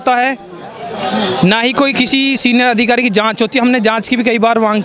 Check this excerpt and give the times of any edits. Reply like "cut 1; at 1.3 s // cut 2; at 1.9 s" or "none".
none